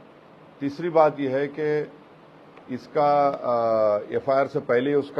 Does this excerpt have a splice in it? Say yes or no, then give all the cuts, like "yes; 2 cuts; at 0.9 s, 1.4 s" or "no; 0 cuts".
no; 0 cuts